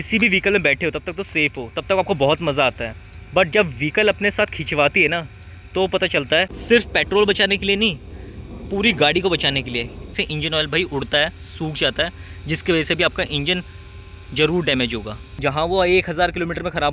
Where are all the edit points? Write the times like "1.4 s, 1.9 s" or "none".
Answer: 6.6 s, 10.2 s, 15.4 s